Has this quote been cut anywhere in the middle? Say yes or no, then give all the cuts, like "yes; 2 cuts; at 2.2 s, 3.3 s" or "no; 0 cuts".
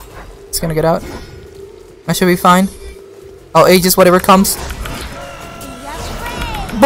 no; 0 cuts